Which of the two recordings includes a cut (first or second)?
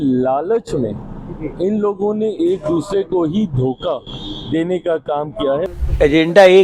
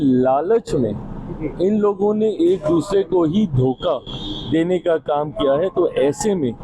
first